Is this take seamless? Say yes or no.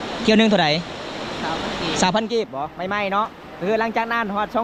yes